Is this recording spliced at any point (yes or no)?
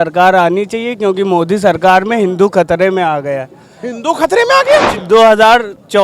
yes